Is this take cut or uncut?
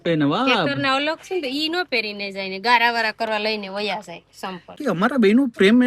cut